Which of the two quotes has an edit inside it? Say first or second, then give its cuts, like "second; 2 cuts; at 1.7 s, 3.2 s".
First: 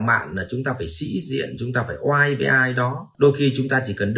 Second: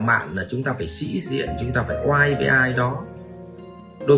first; 1 cut; at 3.0 s